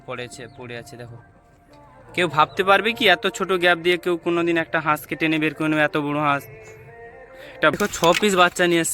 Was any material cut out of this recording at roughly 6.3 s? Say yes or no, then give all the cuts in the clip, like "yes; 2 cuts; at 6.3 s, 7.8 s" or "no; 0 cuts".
no; 1 cut; at 7.8 s